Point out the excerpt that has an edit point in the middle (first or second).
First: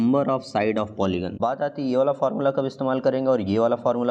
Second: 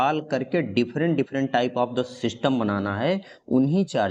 first